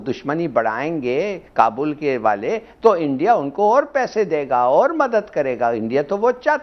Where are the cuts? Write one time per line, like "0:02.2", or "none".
none